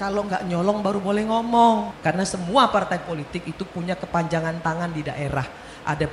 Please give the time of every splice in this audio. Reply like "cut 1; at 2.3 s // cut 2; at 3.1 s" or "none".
cut 1; at 1.9 s